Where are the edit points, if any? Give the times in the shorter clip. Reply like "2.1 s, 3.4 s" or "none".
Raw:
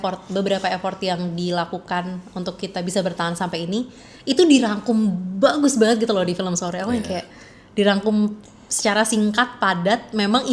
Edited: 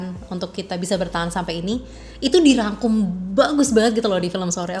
none